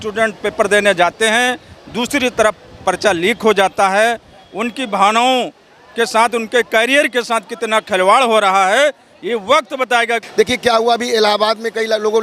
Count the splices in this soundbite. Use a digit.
1